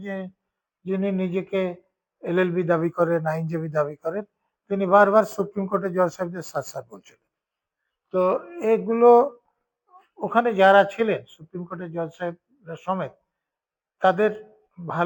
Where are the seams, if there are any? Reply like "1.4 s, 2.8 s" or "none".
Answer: none